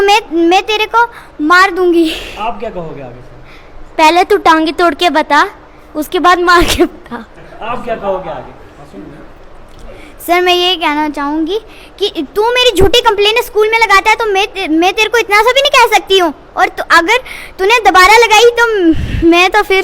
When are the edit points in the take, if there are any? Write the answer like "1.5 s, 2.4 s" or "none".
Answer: none